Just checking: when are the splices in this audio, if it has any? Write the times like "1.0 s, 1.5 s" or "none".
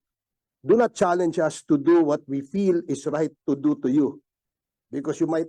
none